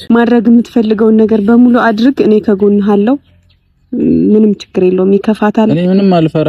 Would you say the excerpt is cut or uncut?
uncut